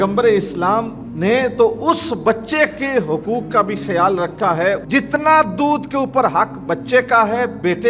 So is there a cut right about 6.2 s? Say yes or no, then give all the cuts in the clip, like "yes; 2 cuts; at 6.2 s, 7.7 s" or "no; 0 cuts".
no; 1 cut; at 4.8 s